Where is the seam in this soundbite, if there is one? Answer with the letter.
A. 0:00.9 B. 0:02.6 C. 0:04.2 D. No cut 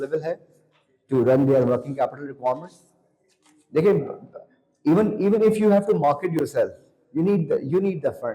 D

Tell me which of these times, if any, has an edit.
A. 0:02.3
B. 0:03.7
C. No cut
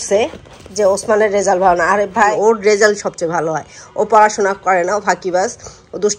A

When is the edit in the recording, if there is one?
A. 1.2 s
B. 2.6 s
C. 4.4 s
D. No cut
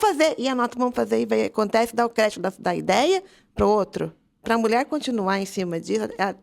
C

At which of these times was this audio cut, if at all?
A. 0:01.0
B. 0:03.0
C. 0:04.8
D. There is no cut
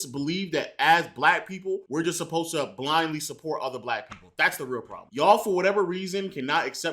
B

